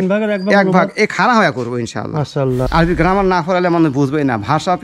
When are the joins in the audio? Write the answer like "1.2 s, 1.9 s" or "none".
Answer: none